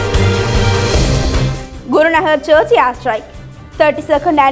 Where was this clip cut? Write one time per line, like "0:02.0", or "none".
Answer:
0:01.3